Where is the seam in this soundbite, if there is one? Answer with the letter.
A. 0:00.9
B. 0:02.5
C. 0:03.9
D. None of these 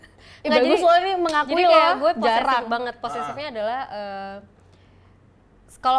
D